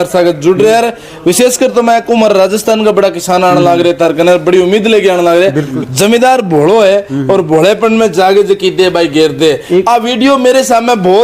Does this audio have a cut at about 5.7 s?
yes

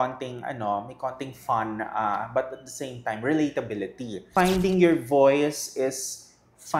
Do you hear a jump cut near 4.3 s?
yes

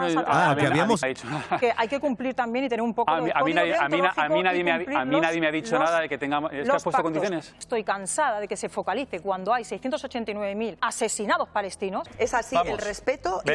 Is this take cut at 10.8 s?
yes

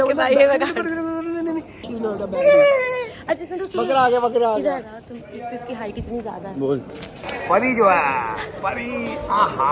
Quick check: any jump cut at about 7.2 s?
yes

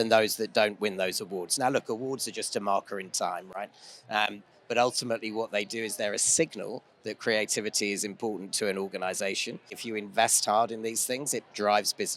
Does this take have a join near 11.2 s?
no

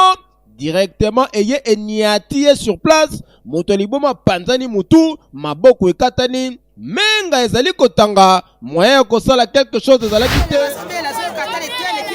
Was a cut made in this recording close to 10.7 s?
yes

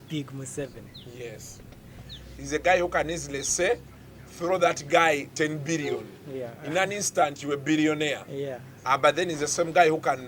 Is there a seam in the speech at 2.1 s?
yes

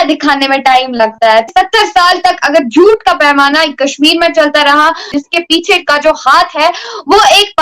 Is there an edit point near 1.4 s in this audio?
yes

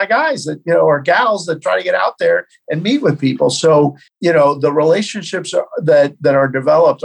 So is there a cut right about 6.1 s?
no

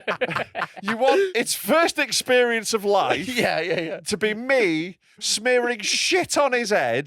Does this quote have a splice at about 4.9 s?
no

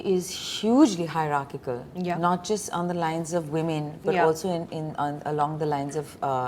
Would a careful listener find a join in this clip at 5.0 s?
no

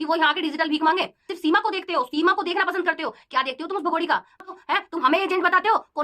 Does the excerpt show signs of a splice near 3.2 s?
no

